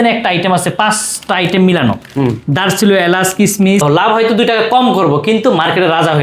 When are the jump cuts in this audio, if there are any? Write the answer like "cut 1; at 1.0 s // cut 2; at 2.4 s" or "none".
cut 1; at 3.8 s